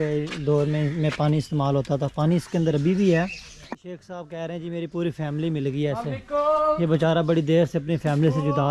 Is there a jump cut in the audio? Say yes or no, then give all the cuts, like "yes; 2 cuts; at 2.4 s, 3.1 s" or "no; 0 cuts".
yes; 1 cut; at 3.7 s